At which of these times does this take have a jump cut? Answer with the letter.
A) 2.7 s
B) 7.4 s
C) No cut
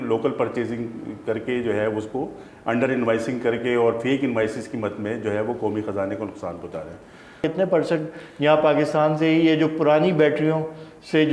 B